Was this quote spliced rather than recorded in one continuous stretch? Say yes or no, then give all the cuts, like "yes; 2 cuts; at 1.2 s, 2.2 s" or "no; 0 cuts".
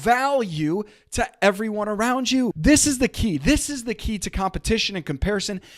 yes; 1 cut; at 2.6 s